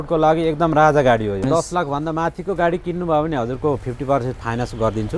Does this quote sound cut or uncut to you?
cut